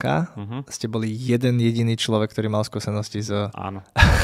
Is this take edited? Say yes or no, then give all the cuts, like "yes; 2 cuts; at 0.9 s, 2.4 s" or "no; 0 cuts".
no; 0 cuts